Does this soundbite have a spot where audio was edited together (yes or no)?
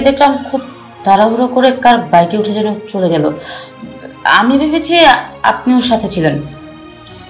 no